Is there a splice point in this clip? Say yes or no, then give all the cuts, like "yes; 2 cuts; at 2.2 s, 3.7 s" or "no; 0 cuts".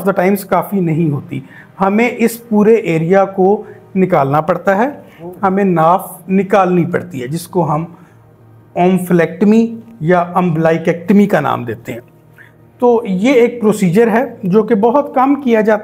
no; 0 cuts